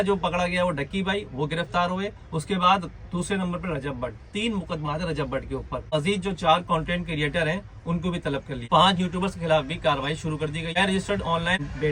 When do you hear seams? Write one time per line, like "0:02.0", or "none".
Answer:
0:05.9
0:08.6
0:10.7